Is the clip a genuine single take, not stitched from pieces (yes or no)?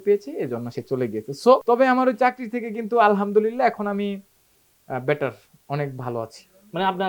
no